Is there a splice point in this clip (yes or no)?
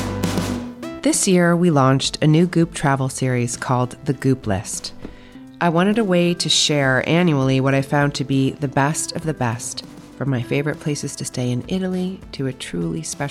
yes